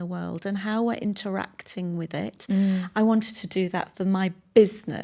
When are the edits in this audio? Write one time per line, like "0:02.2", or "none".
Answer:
none